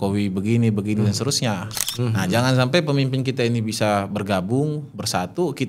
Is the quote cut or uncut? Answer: cut